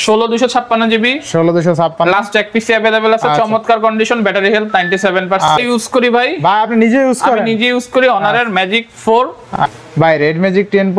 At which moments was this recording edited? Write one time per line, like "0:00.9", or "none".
0:05.5
0:09.4

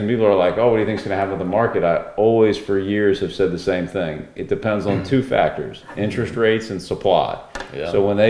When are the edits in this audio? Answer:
none

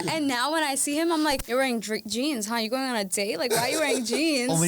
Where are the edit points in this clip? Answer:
0:01.4

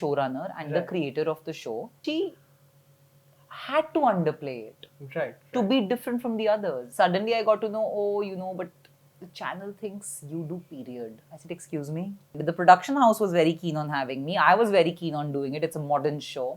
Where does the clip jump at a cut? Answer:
0:02.0
0:06.8
0:12.3

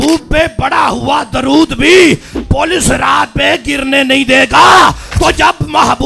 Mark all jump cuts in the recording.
none

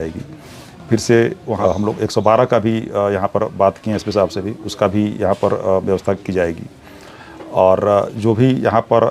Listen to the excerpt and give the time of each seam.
0:01.6

